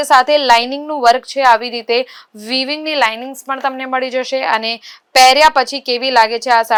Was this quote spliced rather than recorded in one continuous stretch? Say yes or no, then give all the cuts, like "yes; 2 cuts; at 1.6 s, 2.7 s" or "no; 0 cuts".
no; 0 cuts